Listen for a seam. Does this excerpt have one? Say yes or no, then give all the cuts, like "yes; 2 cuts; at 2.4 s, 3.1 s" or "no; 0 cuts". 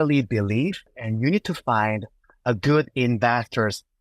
yes; 1 cut; at 0.9 s